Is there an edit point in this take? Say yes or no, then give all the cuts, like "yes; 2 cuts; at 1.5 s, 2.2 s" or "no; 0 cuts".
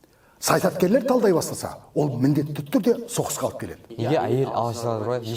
yes; 1 cut; at 3.9 s